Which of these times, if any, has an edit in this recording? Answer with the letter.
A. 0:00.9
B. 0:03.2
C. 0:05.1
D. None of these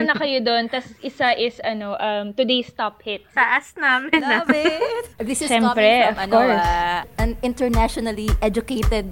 B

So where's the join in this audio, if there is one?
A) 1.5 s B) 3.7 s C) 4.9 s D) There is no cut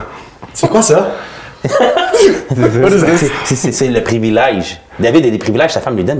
D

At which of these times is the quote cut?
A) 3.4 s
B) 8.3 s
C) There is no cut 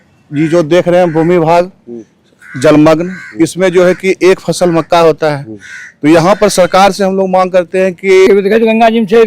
B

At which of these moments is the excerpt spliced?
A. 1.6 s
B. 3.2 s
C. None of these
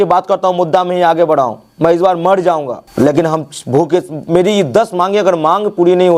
C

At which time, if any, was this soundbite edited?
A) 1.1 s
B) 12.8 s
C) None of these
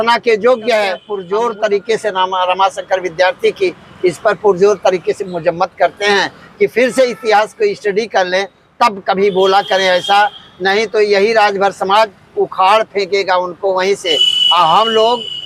A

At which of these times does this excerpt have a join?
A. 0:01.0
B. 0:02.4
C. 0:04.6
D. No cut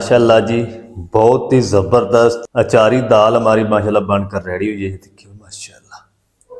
B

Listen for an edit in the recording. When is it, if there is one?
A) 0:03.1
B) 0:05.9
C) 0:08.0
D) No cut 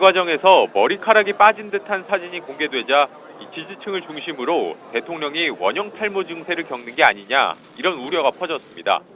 C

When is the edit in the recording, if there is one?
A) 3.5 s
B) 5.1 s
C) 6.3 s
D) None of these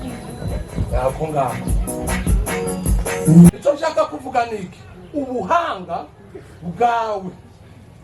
A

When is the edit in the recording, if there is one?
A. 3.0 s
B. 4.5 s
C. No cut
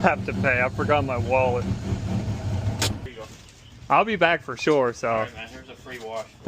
A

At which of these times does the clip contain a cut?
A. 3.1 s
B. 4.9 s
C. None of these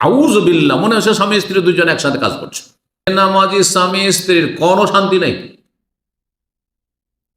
A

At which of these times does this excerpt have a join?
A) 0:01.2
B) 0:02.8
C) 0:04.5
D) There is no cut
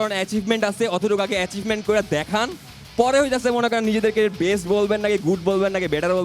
D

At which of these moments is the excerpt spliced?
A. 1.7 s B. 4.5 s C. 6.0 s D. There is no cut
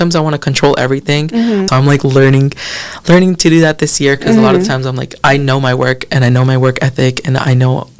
A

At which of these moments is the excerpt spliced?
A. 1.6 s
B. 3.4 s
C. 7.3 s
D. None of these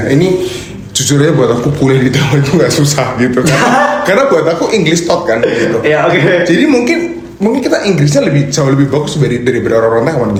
D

